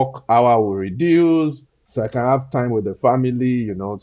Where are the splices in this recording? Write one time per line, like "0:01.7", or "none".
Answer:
0:01.8